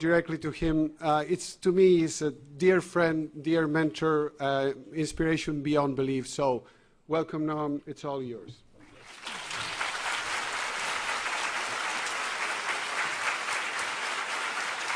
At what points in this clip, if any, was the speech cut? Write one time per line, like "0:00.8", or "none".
0:02.1